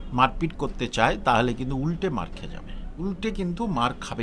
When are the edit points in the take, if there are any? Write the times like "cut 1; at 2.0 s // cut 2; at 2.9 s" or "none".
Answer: cut 1; at 3.0 s